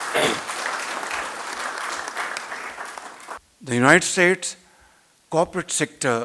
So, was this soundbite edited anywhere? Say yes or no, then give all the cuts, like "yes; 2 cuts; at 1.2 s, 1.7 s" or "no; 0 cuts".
yes; 1 cut; at 3.5 s